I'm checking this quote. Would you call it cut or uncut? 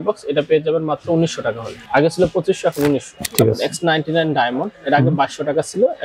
cut